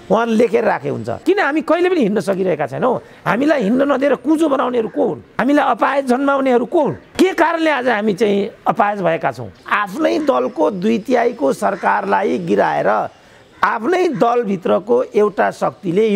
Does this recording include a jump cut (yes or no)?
yes